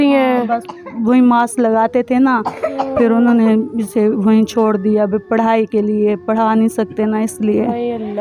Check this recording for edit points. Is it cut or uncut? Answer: uncut